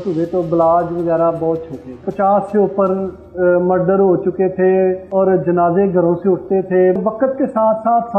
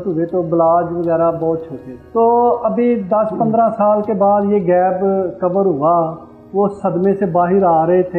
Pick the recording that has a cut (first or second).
first